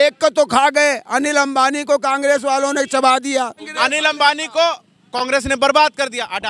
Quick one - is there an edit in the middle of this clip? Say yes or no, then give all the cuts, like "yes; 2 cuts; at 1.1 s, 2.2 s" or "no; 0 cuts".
yes; 1 cut; at 3.6 s